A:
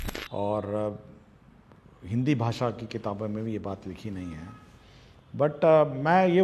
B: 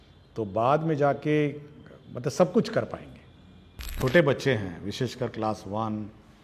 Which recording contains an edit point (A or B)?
B